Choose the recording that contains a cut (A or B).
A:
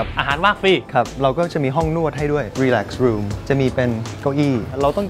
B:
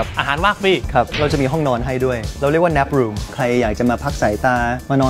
B